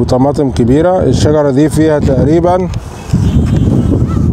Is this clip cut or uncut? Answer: uncut